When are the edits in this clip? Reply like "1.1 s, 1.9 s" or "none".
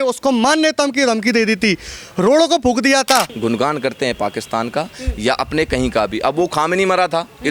3.3 s